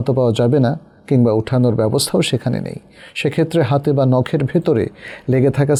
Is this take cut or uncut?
uncut